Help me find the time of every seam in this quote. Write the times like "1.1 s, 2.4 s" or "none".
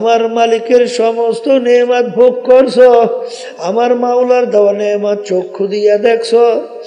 none